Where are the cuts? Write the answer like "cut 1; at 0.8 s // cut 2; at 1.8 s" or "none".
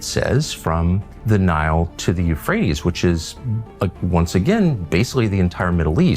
cut 1; at 1.1 s